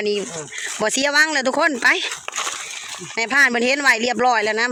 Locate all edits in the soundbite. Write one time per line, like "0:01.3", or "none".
none